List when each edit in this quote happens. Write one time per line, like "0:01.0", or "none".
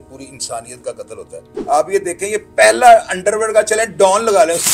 0:01.5